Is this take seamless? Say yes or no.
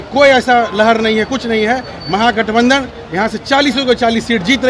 yes